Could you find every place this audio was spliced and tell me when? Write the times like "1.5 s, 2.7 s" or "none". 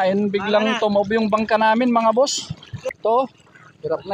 2.9 s